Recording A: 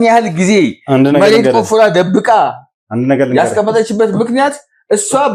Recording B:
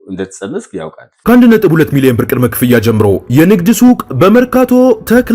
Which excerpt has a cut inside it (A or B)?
B